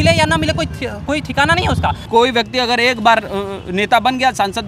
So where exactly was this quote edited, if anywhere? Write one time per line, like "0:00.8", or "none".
0:02.0